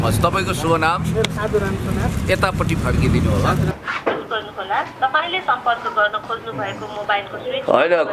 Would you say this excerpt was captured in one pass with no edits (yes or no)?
no